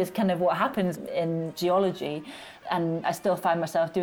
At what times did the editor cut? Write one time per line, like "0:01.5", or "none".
0:01.0